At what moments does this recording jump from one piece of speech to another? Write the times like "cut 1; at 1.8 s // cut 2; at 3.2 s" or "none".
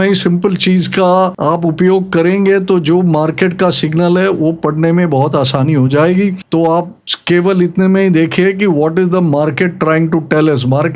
cut 1; at 1.4 s